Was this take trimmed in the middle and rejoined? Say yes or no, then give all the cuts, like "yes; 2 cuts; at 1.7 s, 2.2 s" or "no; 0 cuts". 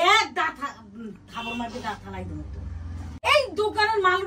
yes; 1 cut; at 3.1 s